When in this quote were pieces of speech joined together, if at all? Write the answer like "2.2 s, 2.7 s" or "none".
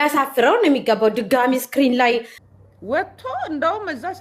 2.4 s